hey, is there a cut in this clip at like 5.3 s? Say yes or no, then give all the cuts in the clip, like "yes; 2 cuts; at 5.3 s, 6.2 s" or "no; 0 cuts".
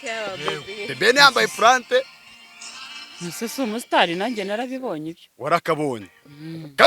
no; 0 cuts